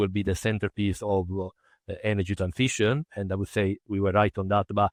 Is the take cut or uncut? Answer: uncut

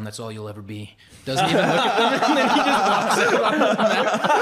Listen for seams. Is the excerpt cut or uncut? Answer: uncut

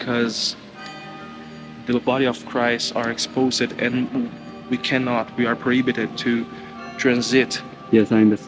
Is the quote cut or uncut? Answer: uncut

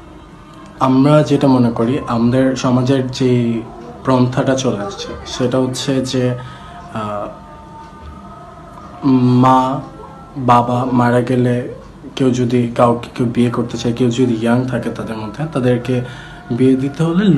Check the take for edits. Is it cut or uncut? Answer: uncut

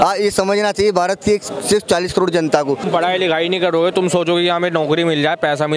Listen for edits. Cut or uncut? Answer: cut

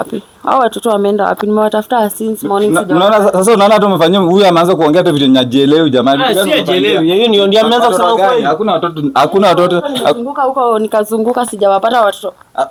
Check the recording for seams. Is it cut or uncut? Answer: uncut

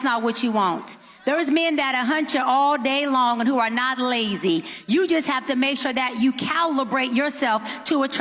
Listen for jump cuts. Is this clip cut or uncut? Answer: uncut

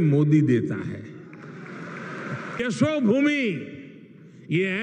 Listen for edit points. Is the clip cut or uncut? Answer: cut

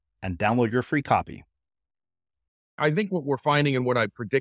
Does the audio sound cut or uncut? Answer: cut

